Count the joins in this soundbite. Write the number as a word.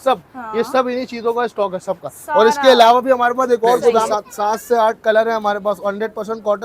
one